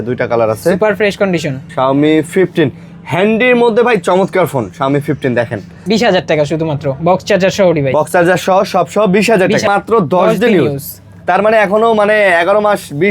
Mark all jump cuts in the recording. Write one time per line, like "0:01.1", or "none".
0:01.6
0:05.8
0:09.7